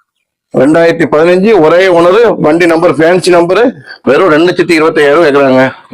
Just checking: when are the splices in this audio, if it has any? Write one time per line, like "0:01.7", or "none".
0:03.9

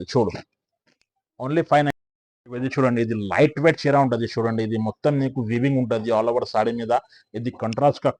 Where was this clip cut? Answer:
0:01.9

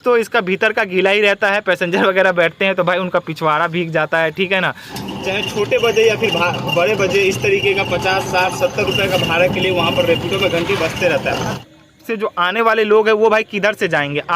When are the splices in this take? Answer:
0:04.9
0:11.6

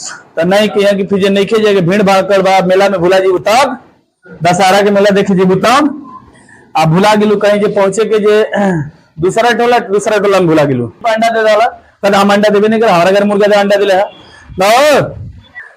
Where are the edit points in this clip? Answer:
0:11.0

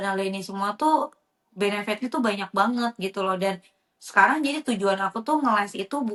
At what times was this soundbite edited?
none

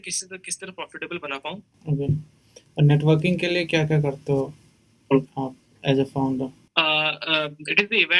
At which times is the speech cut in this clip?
0:01.7
0:06.6

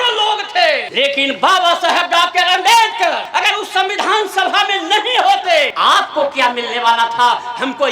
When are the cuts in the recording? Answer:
0:00.9
0:03.2
0:05.7

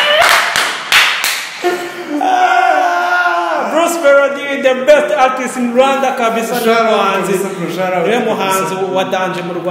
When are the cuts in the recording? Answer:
none

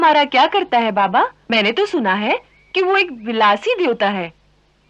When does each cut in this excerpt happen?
0:01.4

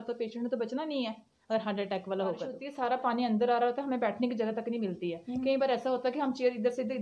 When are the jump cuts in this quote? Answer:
0:02.6

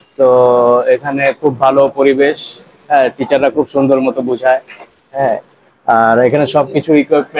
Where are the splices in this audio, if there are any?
none

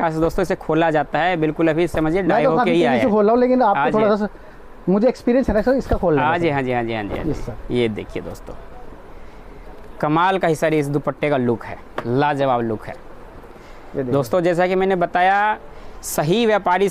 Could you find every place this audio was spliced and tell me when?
none

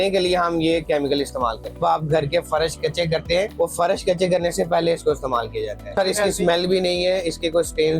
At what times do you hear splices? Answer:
0:01.8
0:03.5
0:06.0

